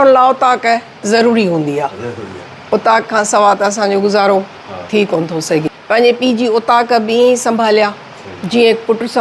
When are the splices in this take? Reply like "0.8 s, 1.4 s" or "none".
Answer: 5.8 s